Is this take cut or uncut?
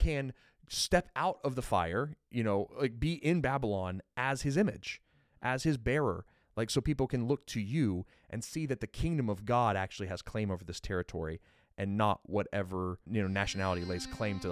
cut